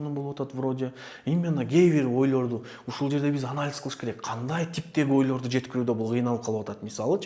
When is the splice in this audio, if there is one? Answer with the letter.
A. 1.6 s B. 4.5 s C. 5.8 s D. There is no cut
D